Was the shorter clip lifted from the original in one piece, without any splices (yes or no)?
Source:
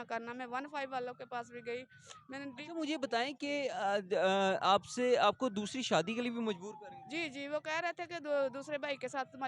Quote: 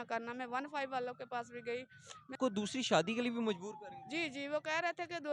no